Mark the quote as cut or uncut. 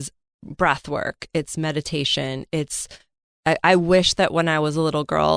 uncut